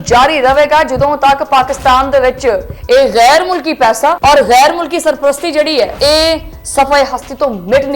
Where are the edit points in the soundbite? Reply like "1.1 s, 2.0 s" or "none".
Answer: 4.2 s, 5.9 s

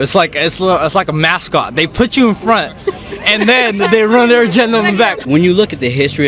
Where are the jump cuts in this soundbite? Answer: 5.2 s

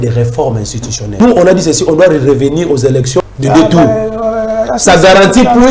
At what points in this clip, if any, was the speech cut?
1.2 s, 3.3 s

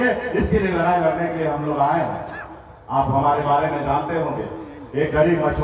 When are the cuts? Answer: none

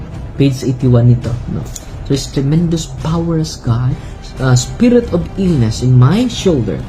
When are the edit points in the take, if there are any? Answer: 4.0 s

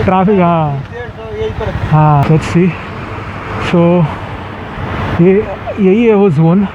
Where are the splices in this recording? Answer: 2.2 s

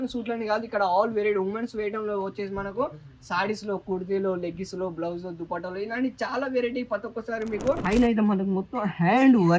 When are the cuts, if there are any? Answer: 7.8 s

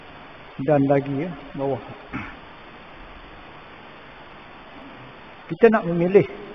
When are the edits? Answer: 4.8 s

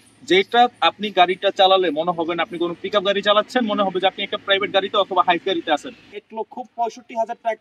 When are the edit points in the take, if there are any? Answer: 6.1 s

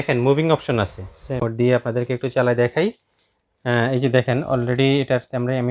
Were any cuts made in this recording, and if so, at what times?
1.4 s

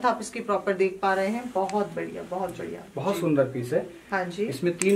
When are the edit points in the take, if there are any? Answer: none

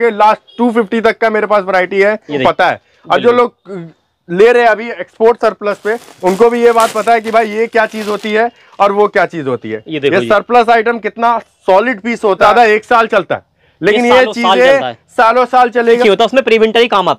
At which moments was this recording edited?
2.4 s, 12.4 s, 16.0 s

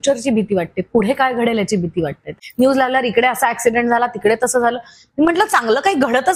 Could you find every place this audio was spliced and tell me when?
2.3 s

